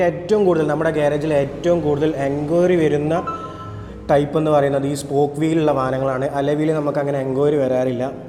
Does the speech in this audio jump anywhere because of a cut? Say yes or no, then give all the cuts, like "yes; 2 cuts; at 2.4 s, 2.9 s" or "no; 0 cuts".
no; 0 cuts